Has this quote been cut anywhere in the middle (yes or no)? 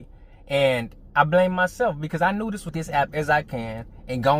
yes